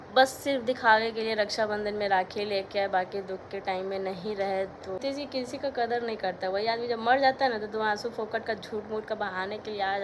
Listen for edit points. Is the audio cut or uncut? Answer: cut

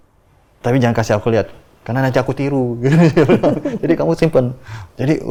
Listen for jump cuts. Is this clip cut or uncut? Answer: uncut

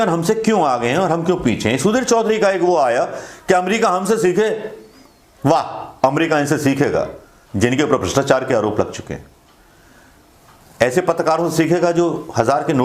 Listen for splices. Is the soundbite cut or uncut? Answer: uncut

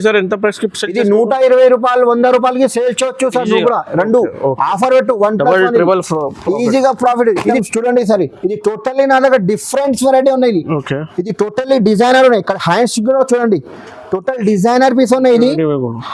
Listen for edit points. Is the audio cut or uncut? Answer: cut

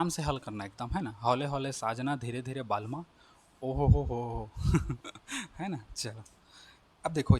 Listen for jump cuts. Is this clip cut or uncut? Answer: uncut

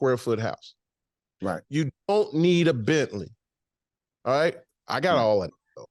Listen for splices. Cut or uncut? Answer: uncut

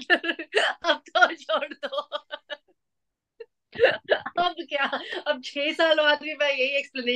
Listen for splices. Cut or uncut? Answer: uncut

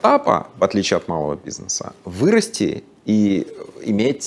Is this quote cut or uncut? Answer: uncut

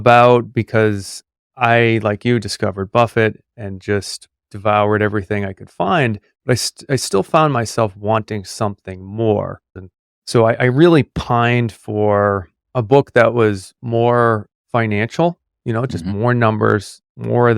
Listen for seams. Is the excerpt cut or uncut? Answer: cut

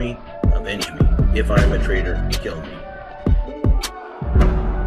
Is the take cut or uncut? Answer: cut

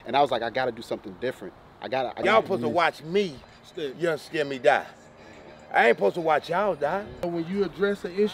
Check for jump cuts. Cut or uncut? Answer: cut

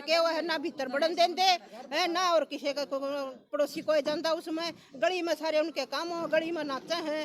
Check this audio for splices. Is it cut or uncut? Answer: uncut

